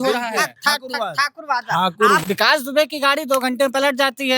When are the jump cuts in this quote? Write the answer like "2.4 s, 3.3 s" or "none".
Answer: 2.2 s